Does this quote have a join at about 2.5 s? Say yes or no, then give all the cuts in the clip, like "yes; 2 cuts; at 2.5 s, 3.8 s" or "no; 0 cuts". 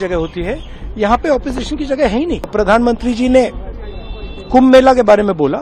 yes; 1 cut; at 2.5 s